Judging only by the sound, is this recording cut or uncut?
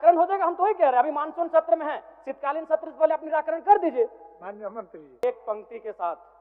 cut